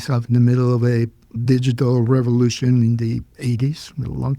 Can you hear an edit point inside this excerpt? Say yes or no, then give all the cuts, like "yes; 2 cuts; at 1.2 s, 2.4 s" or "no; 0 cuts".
yes; 2 cuts; at 1.3 s, 3.3 s